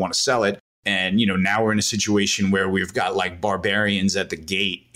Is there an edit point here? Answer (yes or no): no